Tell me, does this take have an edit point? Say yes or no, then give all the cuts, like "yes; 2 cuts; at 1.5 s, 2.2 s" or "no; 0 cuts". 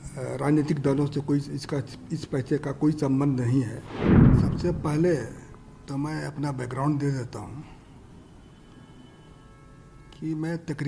yes; 1 cut; at 3.8 s